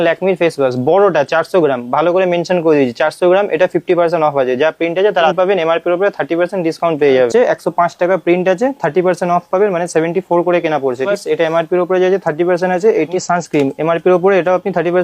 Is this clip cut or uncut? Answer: cut